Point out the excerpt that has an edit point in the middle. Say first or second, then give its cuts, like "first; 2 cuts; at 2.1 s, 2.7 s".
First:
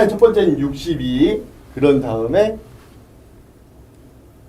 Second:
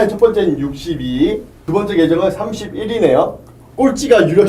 second; 1 cut; at 1.5 s